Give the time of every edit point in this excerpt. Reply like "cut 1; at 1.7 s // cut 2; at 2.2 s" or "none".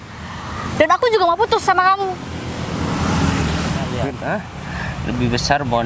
cut 1; at 4.1 s